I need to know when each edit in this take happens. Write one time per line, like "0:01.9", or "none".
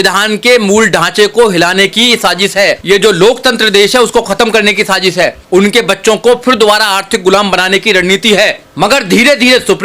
0:02.8
0:05.4
0:08.6